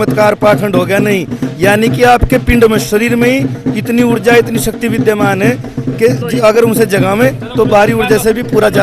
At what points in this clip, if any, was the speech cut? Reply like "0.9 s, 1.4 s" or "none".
none

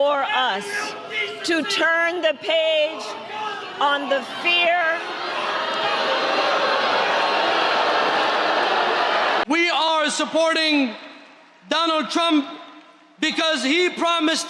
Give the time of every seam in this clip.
9.4 s

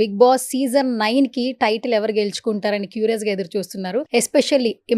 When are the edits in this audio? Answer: 4.1 s

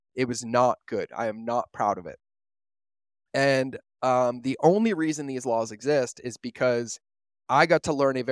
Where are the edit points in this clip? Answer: none

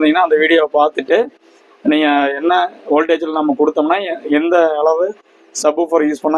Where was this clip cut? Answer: none

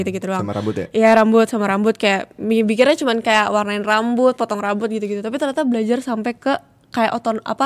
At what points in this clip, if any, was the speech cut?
none

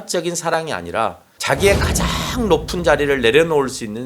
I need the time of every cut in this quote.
1.3 s

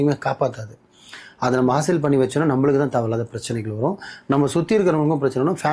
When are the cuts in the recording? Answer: none

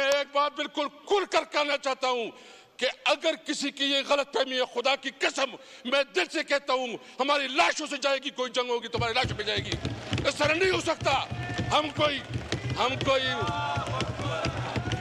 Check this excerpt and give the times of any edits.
none

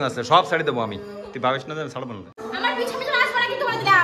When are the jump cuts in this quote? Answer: 2.4 s

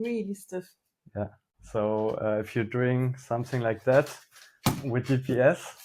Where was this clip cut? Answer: none

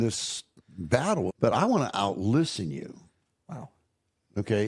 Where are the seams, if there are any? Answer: 1.3 s

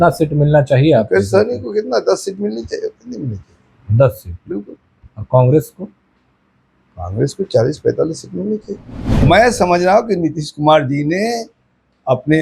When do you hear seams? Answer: 9.2 s

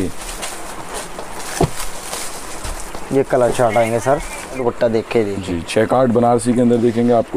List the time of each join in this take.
4.6 s

